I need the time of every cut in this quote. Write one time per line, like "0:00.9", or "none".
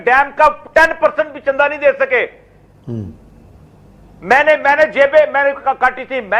none